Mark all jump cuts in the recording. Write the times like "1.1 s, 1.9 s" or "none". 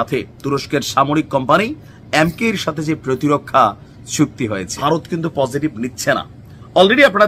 4.7 s